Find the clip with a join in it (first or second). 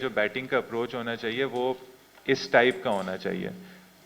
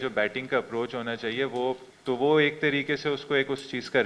second